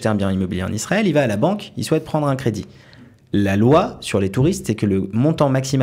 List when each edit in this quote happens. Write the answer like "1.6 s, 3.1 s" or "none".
none